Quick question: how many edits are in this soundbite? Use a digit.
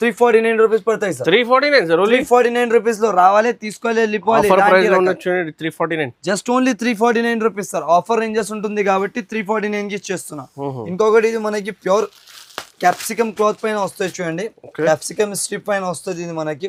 0